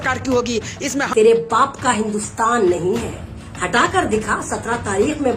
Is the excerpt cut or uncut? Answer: cut